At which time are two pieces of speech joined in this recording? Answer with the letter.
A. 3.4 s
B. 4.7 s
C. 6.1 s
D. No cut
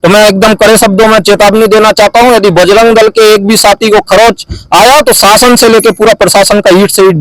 D